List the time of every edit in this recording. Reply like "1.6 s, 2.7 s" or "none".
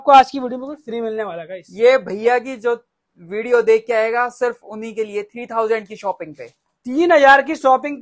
none

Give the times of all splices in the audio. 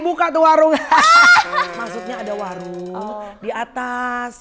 none

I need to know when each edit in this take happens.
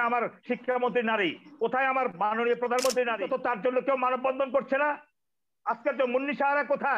3.2 s

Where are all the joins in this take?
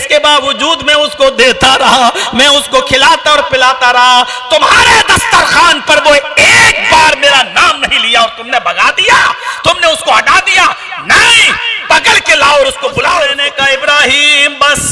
13.4 s

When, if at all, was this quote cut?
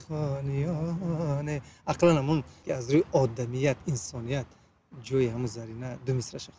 2.6 s

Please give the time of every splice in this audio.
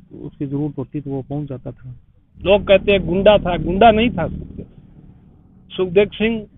2.2 s

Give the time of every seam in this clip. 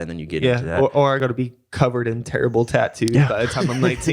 1.2 s

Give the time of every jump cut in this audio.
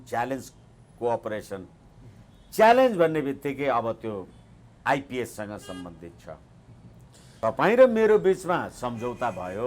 7.4 s

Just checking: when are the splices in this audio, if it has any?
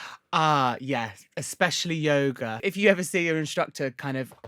2.6 s

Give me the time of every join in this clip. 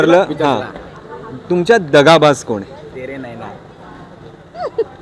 none

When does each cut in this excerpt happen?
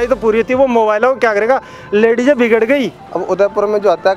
3.0 s

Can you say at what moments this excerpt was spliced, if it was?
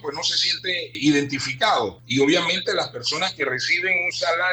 1.0 s, 2.0 s

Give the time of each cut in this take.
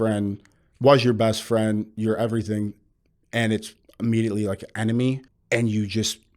5.3 s

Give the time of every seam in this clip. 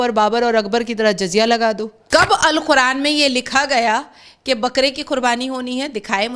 1.9 s

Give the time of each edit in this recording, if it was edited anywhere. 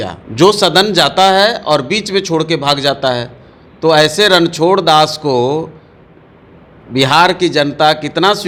none

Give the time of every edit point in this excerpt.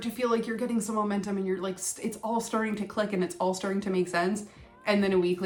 none

